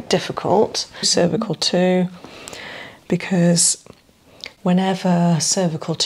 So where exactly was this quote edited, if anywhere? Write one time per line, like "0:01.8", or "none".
0:01.1